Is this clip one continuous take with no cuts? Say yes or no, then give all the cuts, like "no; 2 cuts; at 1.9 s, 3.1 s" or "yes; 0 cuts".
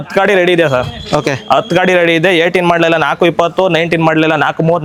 yes; 0 cuts